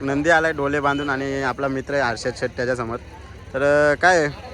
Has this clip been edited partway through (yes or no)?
no